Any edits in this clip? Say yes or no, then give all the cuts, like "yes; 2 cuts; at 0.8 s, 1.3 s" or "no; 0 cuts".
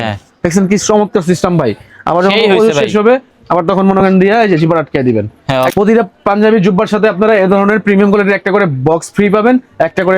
yes; 1 cut; at 5.7 s